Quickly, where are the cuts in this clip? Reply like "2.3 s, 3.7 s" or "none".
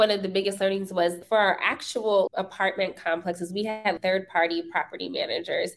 1.2 s, 2.3 s, 4.0 s